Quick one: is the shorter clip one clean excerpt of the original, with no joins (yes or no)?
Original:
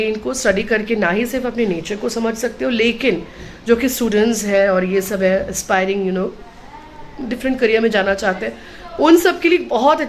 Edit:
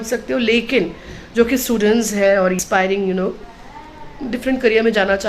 no